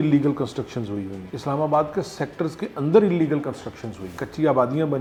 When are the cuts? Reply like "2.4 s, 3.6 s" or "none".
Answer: none